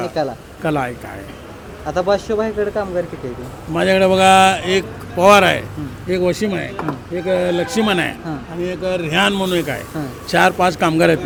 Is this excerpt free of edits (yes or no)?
yes